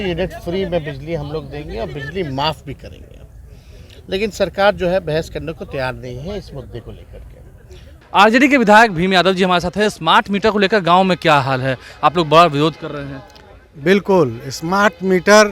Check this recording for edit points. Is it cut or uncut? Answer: uncut